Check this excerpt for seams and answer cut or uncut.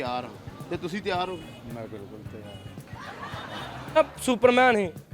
cut